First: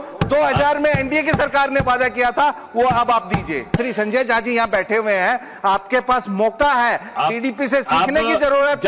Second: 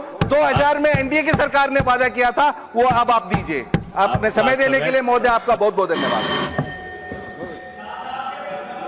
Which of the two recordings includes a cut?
first; 1 cut; at 3.8 s

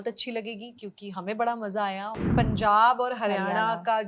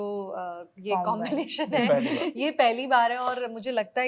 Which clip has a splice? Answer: first; 1 cut; at 2.2 s

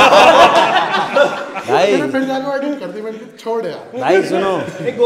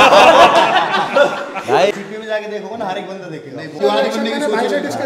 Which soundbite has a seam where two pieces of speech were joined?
second; 2 cuts; at 1.9 s, 3.8 s

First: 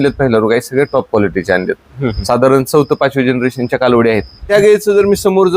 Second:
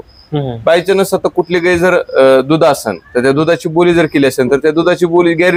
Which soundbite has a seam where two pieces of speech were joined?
first; 1 cut; at 4.5 s

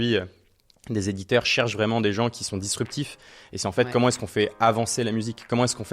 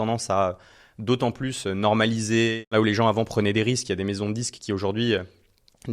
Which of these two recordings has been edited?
second; 1 cut; at 2.7 s

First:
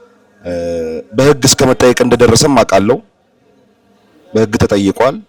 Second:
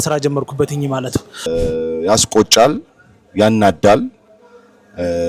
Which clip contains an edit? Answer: second; 1 cut; at 1.5 s

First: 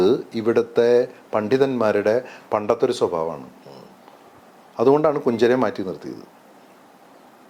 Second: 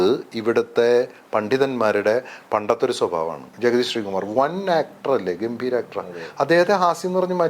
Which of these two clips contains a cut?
second; 1 cut; at 3.5 s

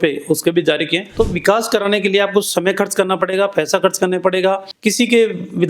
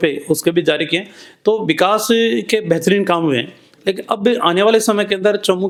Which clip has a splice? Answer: first; 2 cuts; at 1.0 s, 4.7 s

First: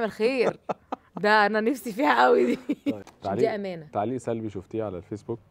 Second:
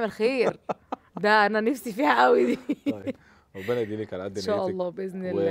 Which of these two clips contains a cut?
first; 1 cut; at 3.1 s

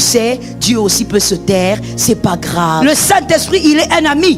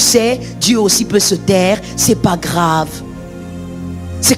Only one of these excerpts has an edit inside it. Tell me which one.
first; 1 cut; at 2.8 s

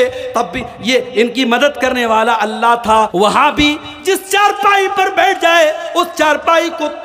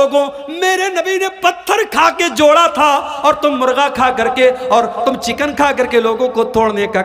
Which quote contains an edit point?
first; 1 cut; at 3.1 s

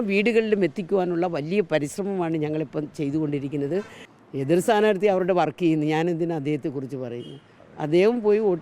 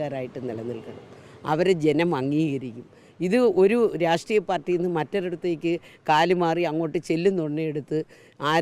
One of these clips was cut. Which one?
first; 1 cut; at 4.0 s

